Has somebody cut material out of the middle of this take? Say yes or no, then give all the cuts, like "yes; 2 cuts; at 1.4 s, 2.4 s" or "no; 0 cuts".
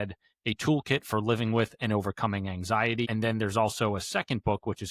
yes; 1 cut; at 3.1 s